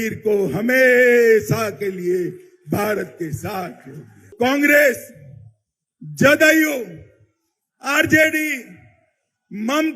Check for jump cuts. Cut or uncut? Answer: cut